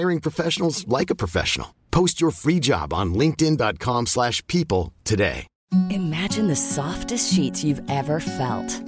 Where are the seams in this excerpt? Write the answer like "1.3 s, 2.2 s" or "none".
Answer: 5.5 s